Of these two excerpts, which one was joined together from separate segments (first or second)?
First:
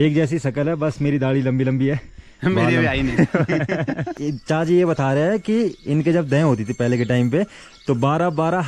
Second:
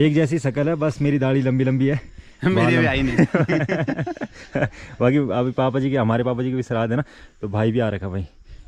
first